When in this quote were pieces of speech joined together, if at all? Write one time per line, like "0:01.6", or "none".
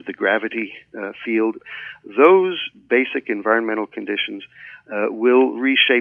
0:01.6